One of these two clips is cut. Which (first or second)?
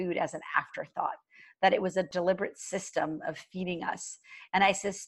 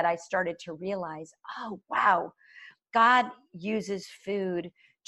first